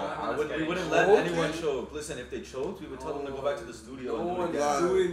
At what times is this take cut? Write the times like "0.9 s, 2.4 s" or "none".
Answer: none